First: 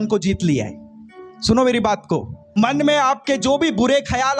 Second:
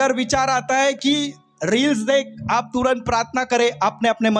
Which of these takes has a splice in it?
first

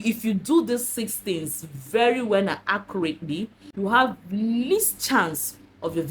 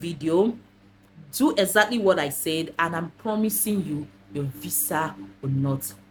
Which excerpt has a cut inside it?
first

